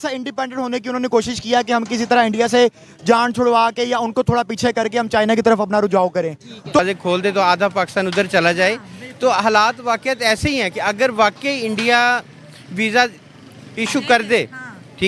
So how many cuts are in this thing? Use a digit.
1